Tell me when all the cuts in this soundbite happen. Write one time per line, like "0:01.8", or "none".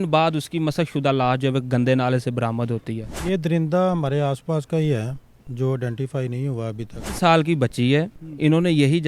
0:03.1
0:07.2